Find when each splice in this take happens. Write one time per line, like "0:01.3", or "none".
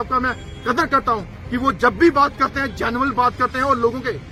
none